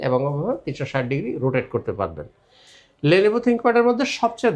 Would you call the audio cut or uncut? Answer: uncut